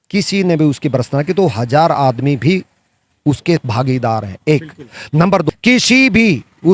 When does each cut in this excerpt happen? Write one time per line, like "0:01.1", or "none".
0:05.5